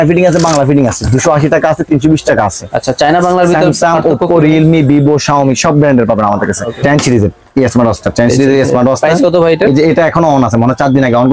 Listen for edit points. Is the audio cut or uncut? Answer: cut